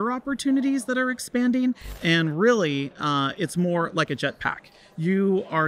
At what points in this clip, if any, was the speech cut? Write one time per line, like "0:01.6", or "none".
0:01.9